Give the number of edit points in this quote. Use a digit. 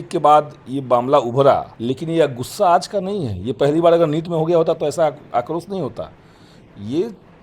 1